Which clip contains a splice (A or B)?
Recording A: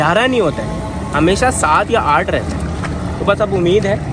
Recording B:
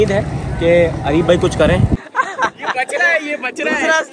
B